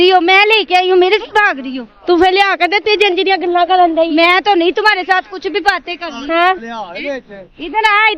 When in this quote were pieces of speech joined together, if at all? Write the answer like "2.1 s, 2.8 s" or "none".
none